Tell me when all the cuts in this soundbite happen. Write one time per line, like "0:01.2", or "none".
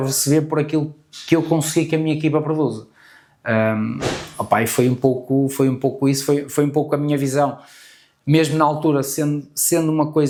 none